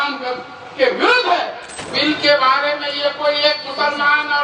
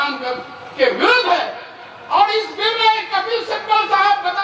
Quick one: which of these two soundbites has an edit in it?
first; 1 cut; at 1.8 s

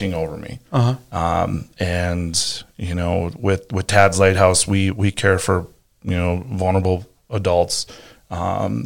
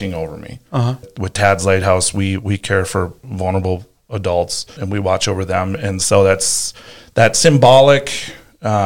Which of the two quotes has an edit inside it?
second; 3 cuts; at 1.1 s, 3.3 s, 4.8 s

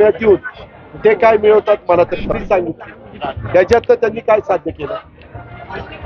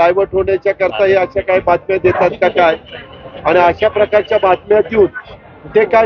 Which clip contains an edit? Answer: first; 1 cut; at 2.3 s

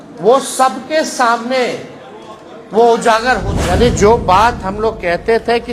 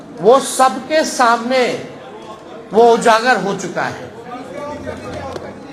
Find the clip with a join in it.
first; 1 cut; at 3.5 s

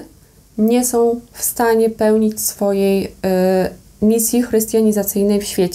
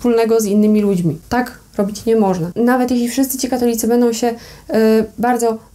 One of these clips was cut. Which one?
second; 2 cuts; at 1.2 s, 2.5 s

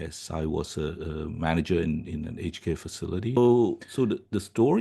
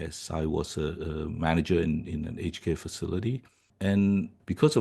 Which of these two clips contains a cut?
first; 1 cut; at 3.4 s

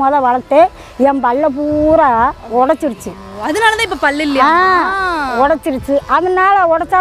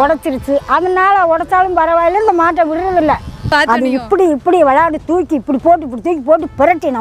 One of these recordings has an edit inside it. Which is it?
second; 1 cut; at 3.4 s

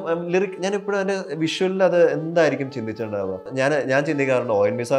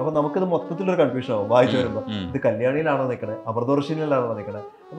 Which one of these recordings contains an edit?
first; 1 cut; at 3.5 s

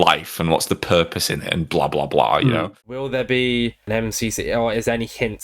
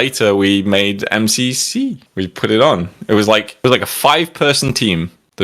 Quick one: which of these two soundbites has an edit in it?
first; 1 cut; at 2.9 s

